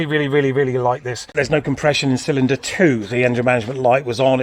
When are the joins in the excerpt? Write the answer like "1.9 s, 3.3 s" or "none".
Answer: 1.3 s